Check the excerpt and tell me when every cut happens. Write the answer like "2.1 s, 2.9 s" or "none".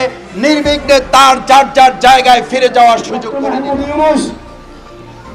3.3 s